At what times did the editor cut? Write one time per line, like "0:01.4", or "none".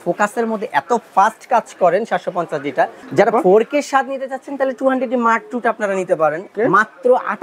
0:03.0
0:06.5